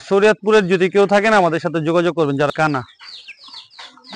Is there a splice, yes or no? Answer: yes